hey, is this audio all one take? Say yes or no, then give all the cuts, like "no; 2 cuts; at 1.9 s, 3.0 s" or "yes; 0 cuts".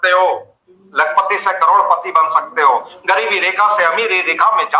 yes; 0 cuts